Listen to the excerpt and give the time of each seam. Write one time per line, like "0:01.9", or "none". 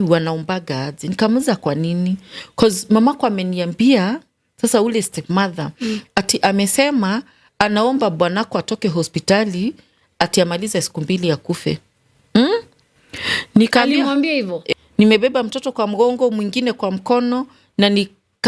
0:14.6